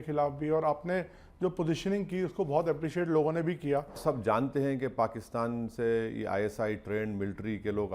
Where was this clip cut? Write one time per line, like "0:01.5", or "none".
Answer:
0:04.0